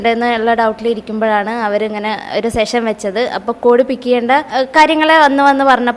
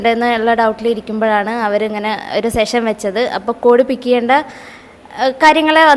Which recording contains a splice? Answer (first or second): first